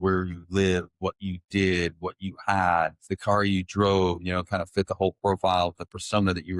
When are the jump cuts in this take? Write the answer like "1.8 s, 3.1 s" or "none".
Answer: 3.1 s